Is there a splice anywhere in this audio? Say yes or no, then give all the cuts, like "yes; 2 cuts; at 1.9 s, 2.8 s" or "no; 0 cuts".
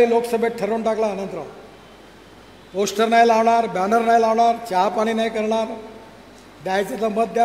no; 0 cuts